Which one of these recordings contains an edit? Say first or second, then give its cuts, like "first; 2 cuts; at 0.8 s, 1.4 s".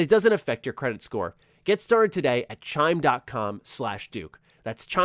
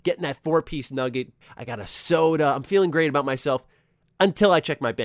second; 1 cut; at 1.4 s